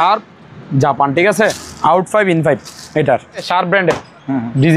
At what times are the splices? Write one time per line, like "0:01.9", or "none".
0:01.7
0:03.5